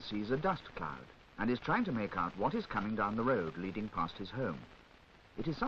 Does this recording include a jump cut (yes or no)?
no